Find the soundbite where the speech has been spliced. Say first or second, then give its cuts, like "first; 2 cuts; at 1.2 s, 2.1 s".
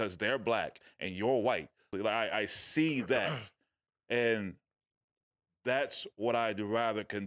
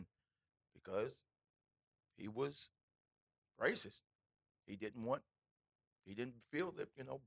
first; 1 cut; at 1.9 s